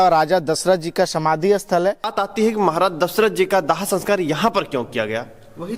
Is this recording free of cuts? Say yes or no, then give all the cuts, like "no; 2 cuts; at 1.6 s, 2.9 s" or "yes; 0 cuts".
no; 1 cut; at 2.1 s